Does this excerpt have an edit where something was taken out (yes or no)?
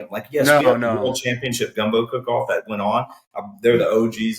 no